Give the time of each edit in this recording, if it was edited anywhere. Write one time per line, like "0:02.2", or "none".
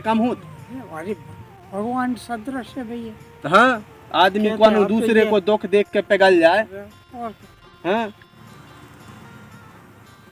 0:08.3